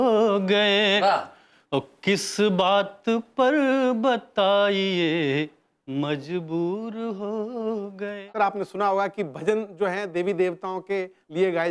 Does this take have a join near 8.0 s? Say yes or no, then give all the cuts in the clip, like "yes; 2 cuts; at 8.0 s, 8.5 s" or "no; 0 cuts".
yes; 1 cut; at 8.0 s